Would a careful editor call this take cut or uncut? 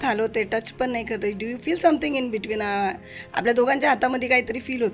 uncut